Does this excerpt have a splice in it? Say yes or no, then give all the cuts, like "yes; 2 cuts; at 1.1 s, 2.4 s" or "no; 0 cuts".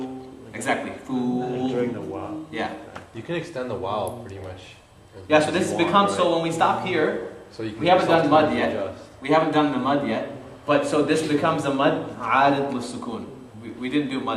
no; 0 cuts